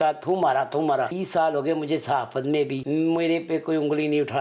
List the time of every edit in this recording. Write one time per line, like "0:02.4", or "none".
0:01.2
0:02.8